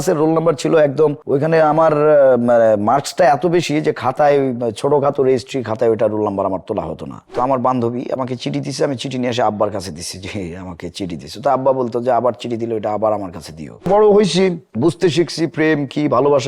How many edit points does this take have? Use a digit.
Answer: 2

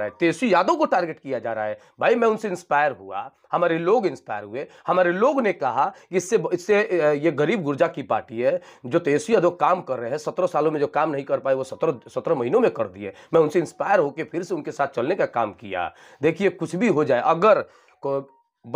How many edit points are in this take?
0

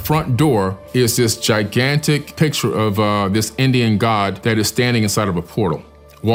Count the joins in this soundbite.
0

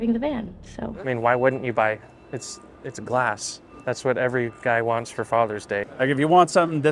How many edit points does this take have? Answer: 2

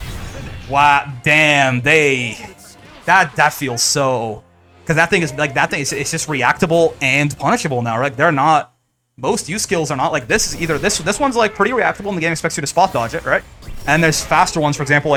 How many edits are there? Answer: 0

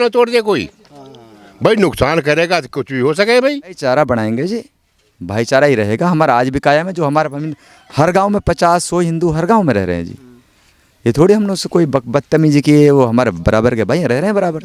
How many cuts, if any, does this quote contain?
1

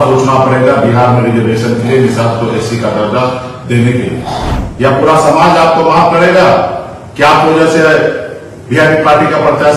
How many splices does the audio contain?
1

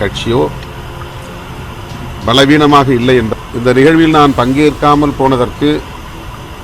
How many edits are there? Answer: 1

